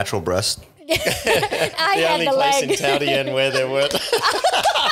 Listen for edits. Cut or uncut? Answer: cut